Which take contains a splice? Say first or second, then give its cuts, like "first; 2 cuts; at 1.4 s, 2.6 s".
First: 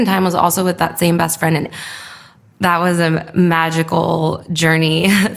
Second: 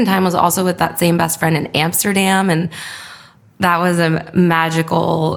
first; 1 cut; at 1.7 s